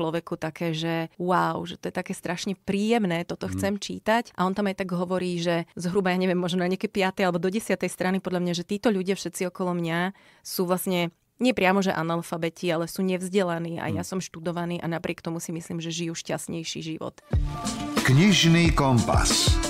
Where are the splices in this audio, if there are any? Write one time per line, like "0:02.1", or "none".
0:01.1
0:04.3
0:05.7
0:17.2